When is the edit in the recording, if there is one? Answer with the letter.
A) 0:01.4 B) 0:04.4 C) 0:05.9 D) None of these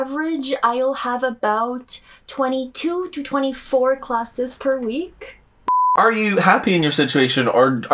C